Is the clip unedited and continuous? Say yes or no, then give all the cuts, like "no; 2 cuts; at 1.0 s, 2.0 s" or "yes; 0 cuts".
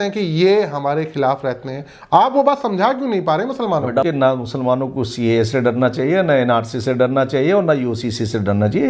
no; 1 cut; at 4.0 s